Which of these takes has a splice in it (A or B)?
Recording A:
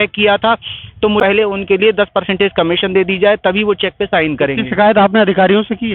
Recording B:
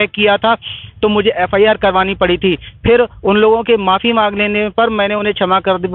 A